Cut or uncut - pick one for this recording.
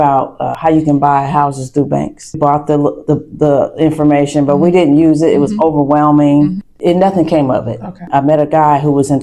cut